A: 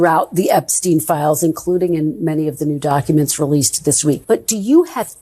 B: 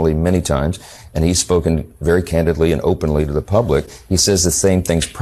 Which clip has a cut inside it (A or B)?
A